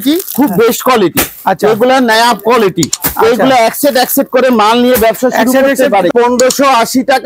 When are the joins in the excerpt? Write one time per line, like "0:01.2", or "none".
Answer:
0:06.1